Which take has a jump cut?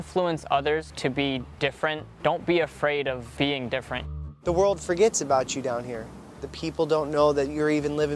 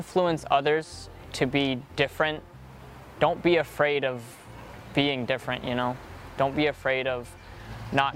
first; 5 cuts; at 0.9 s, 2.1 s, 3.3 s, 4.1 s, 6.5 s

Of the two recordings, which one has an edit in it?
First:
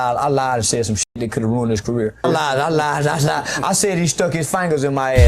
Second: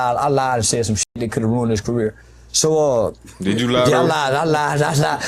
first; 1 cut; at 2.2 s

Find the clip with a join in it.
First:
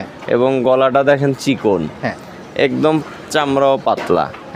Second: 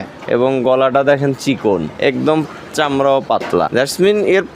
second; 2 cuts; at 1.9 s, 3.7 s

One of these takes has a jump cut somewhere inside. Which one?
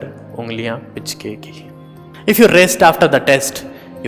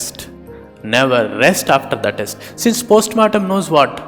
first; 1 cut; at 2.1 s

